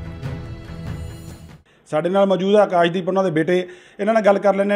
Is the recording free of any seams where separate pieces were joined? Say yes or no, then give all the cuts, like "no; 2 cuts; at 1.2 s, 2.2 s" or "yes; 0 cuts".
yes; 0 cuts